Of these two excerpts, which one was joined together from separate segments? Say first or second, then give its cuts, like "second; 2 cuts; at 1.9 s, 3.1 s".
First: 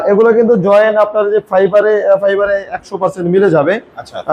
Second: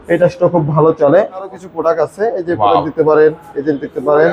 second; 1 cut; at 1.6 s